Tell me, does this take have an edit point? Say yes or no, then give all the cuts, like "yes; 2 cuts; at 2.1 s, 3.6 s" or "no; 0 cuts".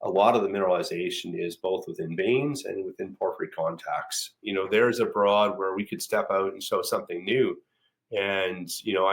yes; 1 cut; at 4.4 s